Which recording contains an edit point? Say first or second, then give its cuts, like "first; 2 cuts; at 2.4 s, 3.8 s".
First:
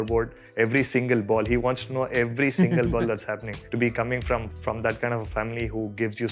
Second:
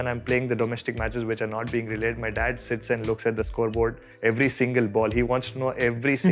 first; 1 cut; at 3.6 s